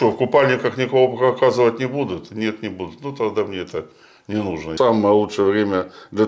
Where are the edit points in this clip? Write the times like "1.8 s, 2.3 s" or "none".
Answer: 4.7 s